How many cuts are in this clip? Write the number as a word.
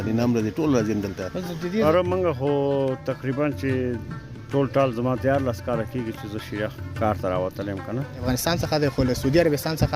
two